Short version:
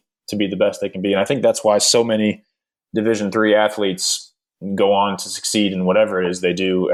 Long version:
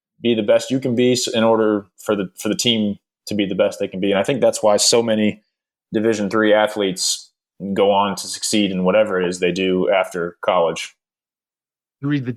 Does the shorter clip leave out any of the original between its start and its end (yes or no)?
no